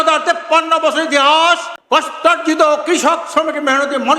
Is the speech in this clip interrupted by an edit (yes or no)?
yes